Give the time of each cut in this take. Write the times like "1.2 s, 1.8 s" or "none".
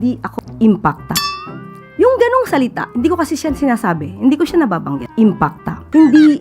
5.3 s